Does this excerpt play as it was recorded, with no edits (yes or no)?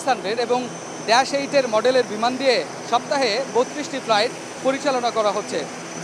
yes